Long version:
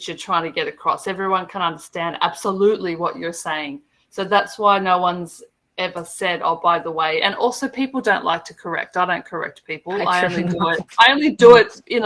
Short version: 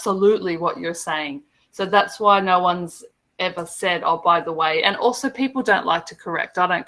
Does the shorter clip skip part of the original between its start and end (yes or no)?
no